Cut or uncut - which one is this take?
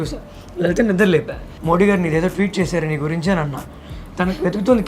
cut